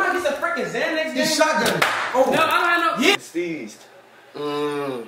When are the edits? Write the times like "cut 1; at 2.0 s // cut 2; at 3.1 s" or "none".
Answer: cut 1; at 3.1 s